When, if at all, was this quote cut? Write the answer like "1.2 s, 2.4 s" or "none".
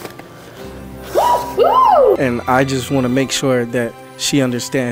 2.2 s